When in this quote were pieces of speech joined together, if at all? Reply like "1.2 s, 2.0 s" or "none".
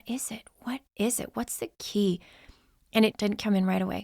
3.1 s